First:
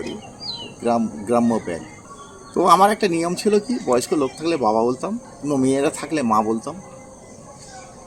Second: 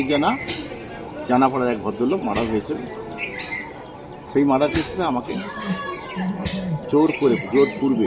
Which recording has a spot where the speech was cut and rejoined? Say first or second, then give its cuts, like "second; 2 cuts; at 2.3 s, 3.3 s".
first; 2 cuts; at 2.0 s, 5.3 s